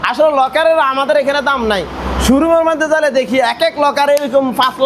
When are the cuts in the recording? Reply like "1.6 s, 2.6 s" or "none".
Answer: none